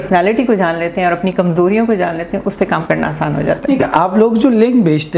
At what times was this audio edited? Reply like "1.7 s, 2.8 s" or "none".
none